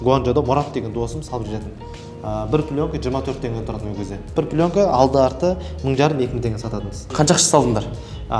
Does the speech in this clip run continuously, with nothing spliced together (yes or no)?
no